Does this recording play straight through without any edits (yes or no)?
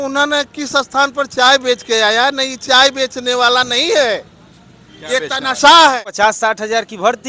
no